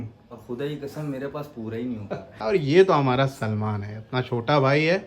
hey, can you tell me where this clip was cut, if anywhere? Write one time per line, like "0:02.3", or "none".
0:02.3